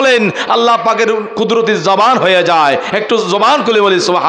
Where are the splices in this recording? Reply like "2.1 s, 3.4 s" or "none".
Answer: none

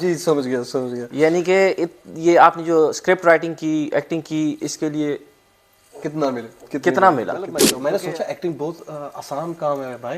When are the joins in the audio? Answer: 7.7 s

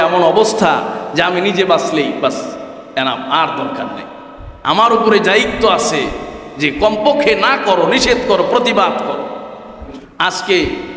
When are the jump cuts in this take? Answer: 9.9 s

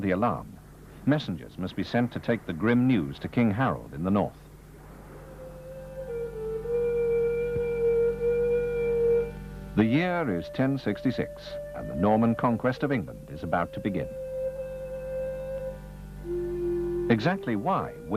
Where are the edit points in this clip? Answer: 8.7 s

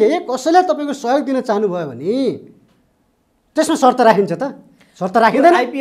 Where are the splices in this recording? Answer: none

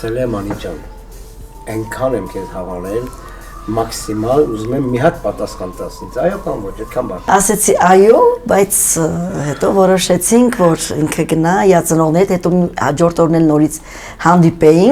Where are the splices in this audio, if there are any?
7.3 s

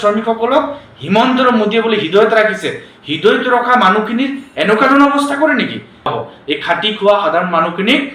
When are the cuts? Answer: 6.1 s

